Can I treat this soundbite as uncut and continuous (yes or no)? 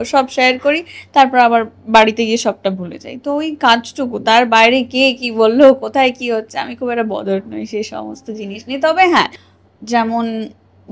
no